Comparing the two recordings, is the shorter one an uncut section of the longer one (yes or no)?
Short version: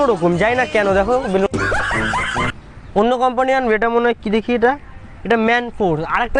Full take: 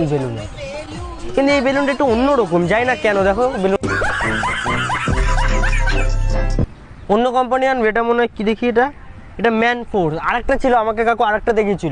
no